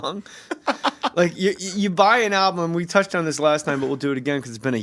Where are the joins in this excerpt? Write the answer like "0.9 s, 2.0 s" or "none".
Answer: 2.7 s